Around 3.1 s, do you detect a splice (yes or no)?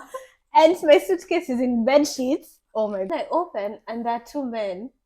yes